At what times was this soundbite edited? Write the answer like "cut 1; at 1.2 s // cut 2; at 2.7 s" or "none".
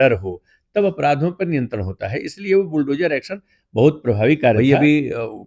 cut 1; at 4.6 s